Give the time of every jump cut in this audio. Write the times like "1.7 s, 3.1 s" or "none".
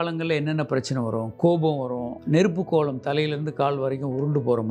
none